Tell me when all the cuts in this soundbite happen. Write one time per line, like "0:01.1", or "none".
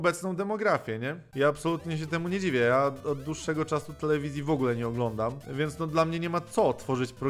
0:01.2
0:05.4